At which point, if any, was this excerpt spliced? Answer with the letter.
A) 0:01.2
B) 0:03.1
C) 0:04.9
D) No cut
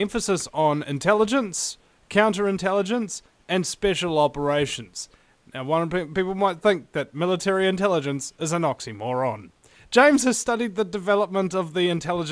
D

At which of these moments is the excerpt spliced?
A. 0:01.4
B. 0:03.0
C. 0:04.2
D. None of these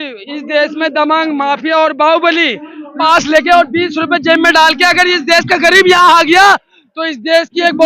B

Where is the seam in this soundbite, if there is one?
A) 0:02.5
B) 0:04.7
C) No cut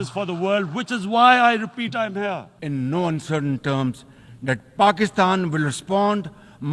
A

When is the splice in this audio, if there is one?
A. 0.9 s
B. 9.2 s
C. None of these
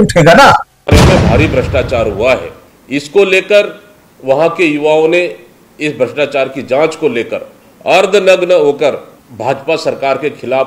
A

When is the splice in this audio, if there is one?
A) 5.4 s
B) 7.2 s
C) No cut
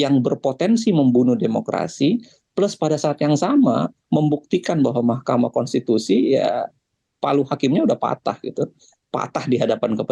C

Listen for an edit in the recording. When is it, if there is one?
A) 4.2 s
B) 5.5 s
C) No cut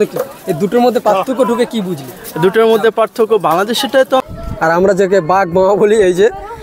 A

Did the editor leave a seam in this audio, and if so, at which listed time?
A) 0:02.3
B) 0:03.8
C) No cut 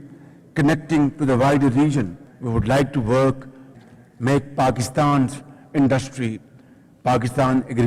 B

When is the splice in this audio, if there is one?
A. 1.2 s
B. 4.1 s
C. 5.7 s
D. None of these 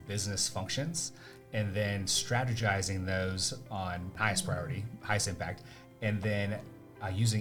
D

